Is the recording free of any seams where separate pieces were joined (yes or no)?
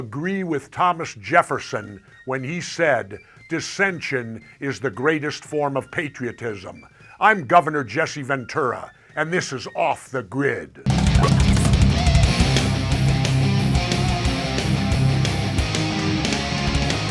no